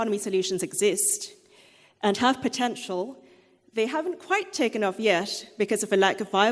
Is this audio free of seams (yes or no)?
yes